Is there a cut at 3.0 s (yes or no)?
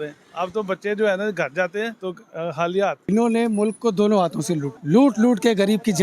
yes